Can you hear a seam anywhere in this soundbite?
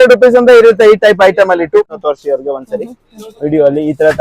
yes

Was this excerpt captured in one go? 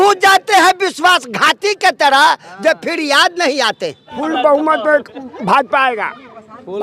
no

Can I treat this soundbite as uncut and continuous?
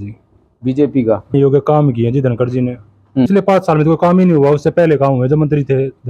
no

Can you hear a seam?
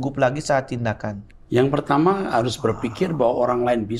yes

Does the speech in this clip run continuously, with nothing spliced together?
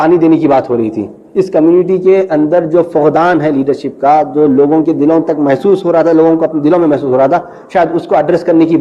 yes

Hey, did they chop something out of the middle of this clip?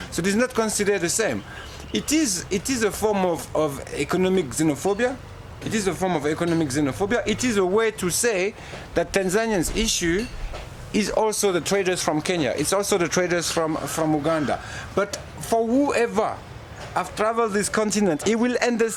no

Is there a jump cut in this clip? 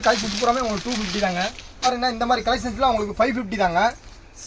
yes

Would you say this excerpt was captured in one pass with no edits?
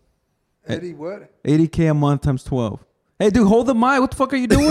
yes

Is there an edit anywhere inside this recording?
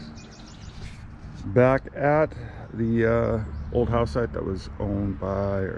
no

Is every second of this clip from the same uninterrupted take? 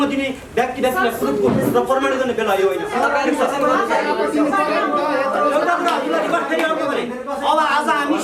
yes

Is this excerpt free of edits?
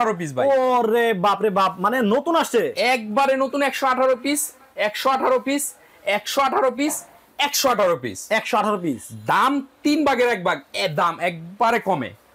yes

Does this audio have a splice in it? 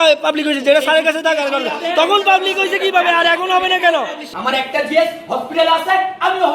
yes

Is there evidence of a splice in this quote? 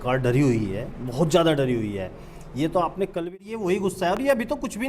yes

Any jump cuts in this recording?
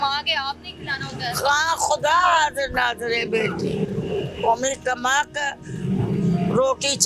no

